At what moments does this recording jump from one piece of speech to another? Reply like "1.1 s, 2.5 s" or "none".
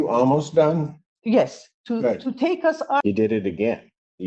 3.0 s